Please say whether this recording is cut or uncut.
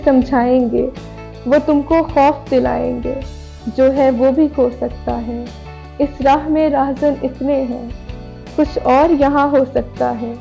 uncut